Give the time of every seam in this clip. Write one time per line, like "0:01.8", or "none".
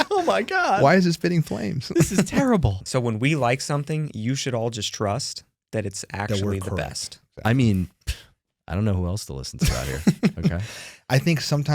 0:02.8